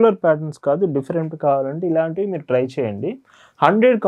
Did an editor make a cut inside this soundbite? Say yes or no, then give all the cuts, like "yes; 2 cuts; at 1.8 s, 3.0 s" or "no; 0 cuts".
no; 0 cuts